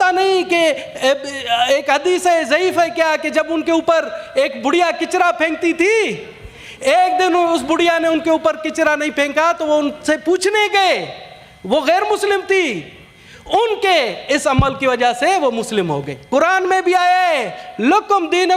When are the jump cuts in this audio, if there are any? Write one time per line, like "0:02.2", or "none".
0:16.1